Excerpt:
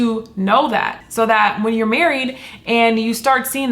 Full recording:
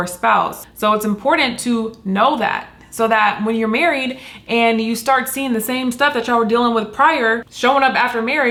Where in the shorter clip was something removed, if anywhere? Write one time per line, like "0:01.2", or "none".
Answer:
0:01.0